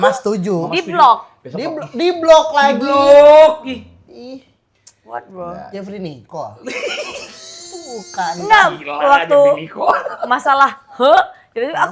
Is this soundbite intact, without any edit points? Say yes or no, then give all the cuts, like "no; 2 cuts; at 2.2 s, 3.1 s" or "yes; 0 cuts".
yes; 0 cuts